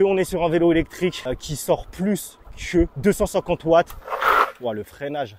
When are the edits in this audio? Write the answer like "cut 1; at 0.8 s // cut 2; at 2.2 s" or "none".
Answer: cut 1; at 1.2 s // cut 2; at 2.9 s